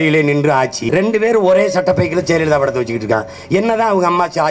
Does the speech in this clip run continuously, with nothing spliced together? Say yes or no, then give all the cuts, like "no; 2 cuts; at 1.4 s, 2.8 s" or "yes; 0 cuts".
yes; 0 cuts